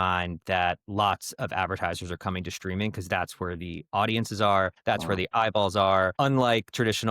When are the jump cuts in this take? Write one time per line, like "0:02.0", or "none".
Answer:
0:04.8
0:06.1

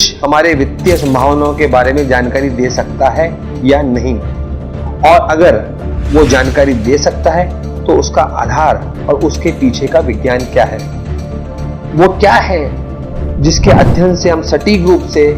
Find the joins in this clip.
none

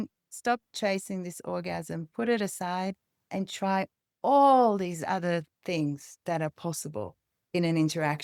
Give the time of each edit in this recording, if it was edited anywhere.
none

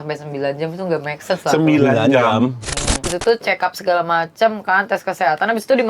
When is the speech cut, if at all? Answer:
0:03.1

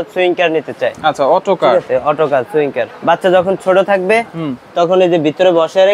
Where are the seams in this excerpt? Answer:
0:02.9

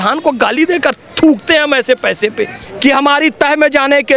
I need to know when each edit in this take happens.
0:02.5

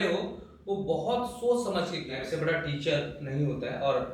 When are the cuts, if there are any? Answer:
0:02.2

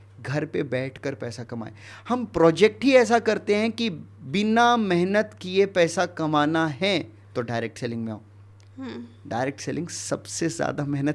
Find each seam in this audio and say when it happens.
none

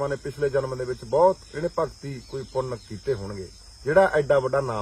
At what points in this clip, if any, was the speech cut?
none

